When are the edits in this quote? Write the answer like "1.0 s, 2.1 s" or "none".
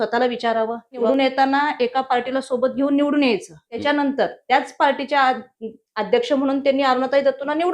1.0 s, 3.8 s